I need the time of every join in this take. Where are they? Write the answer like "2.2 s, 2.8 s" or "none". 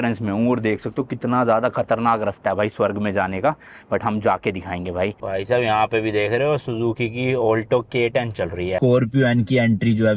5.2 s, 8.8 s